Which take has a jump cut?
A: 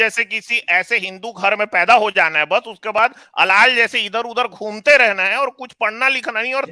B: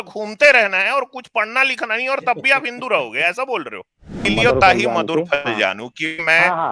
B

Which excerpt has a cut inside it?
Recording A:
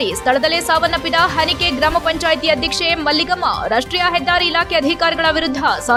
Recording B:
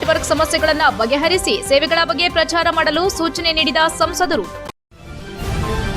B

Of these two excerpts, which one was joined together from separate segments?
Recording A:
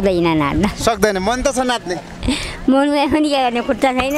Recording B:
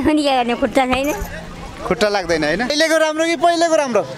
B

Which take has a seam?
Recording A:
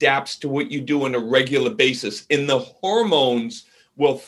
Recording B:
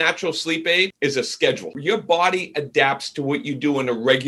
B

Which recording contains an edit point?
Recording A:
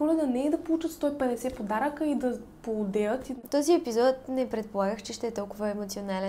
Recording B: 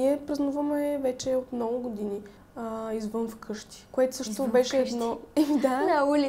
A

